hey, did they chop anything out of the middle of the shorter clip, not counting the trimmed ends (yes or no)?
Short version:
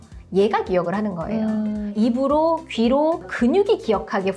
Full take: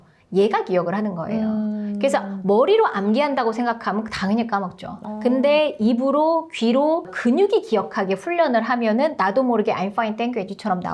yes